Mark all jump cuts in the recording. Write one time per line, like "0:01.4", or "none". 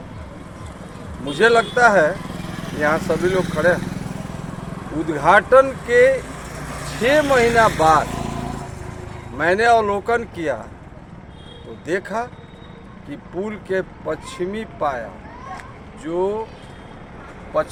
none